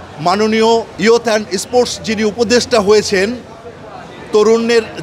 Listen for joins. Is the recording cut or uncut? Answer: cut